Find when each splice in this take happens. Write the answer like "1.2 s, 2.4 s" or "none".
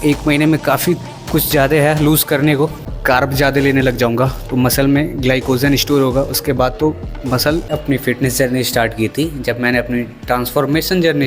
2.9 s, 7.7 s